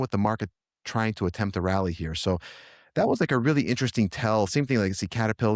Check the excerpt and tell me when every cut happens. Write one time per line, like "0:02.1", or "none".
none